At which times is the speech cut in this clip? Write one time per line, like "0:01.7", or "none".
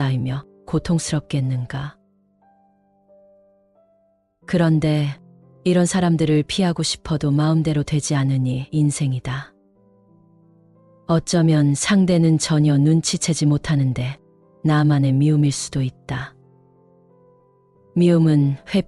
0:01.9
0:04.5
0:09.5
0:10.8